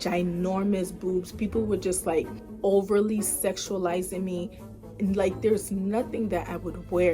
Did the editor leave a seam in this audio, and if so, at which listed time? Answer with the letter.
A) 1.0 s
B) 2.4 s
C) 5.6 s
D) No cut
B